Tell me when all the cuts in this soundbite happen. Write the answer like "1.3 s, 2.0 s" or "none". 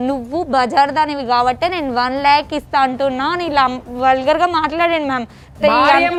none